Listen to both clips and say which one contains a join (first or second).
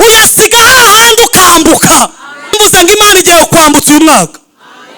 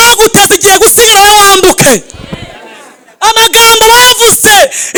first